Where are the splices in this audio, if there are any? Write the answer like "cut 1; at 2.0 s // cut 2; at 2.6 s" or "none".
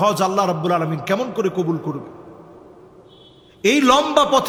none